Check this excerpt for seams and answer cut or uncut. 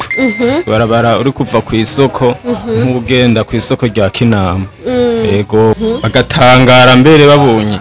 cut